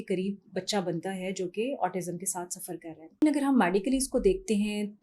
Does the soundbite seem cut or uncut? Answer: cut